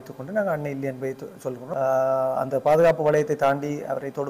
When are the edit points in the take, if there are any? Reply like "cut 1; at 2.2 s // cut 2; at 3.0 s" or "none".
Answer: cut 1; at 1.6 s